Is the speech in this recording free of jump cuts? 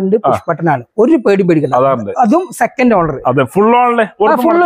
yes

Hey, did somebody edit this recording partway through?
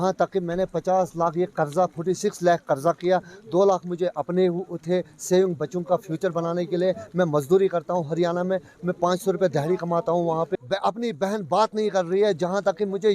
yes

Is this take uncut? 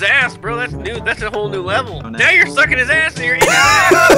no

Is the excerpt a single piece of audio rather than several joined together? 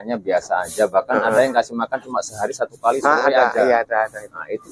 yes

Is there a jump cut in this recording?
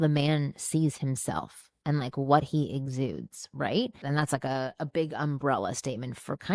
yes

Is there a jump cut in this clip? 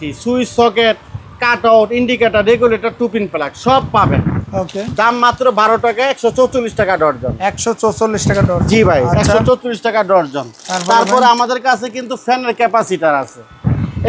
no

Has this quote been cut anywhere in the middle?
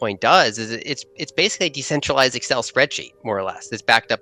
no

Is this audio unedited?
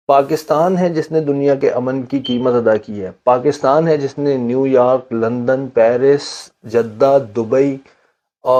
yes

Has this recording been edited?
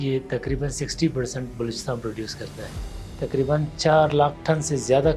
yes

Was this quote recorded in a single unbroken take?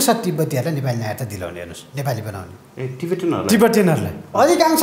yes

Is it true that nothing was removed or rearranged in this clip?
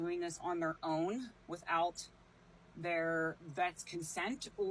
yes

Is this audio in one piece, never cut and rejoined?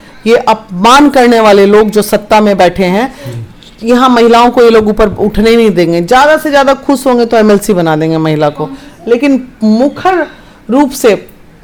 yes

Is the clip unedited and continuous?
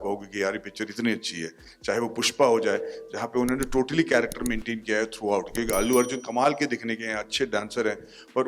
yes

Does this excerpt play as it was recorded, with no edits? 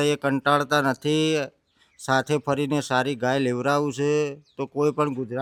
yes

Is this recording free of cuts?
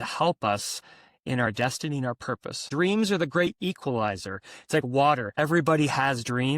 no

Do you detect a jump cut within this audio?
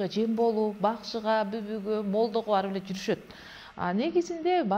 no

